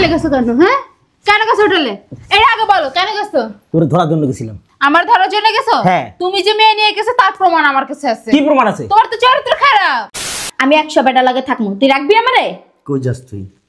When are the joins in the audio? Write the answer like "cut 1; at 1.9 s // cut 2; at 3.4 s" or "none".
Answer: cut 1; at 10.3 s